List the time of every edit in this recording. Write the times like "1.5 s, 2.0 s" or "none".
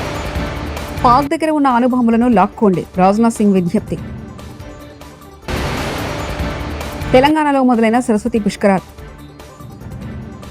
0.9 s